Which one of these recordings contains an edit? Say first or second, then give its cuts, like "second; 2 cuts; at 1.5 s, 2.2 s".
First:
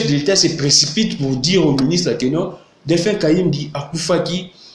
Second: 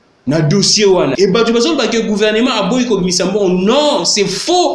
second; 1 cut; at 1.1 s